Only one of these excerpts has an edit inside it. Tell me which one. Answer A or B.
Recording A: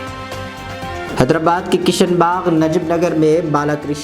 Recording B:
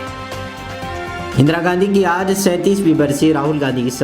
A